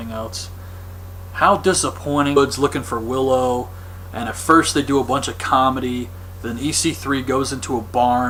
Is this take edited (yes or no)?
no